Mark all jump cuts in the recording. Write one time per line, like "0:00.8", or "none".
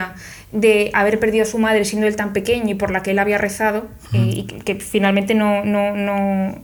none